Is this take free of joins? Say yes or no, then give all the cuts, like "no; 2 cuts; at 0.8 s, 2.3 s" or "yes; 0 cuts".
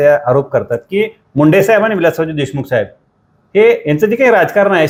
yes; 0 cuts